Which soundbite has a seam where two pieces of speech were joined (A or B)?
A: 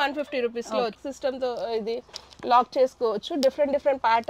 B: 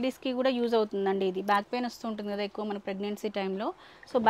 A